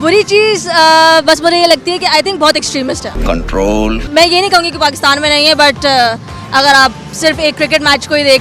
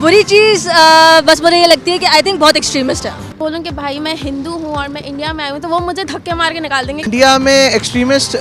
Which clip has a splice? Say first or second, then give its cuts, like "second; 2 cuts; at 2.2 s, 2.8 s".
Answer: second; 2 cuts; at 3.2 s, 6.9 s